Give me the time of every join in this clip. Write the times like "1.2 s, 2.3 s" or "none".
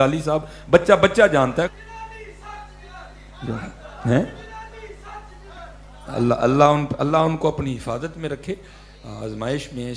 1.7 s